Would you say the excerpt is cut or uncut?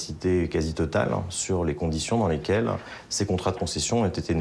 uncut